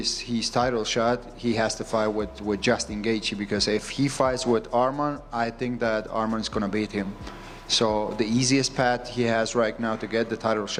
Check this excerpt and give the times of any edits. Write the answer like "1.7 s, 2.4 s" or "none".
none